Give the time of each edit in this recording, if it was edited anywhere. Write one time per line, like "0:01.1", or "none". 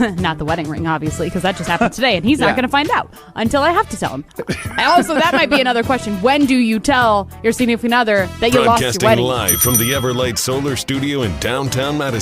0:09.2